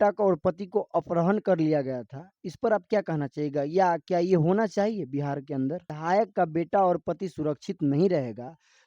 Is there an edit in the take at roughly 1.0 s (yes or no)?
no